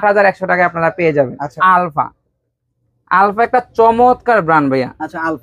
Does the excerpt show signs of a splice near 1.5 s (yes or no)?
yes